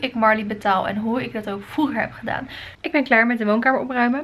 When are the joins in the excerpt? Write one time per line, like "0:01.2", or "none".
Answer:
0:02.7